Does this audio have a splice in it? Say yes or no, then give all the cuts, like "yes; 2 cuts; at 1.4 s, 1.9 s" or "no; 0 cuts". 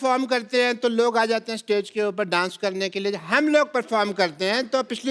no; 0 cuts